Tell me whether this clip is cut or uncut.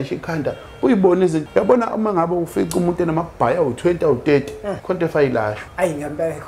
cut